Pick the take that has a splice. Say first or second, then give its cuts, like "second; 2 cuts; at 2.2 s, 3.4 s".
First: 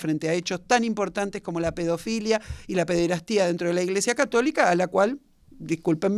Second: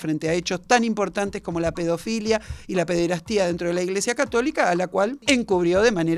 second; 1 cut; at 5.2 s